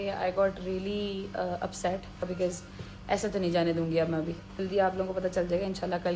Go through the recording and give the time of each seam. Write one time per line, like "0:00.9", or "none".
0:02.3
0:04.6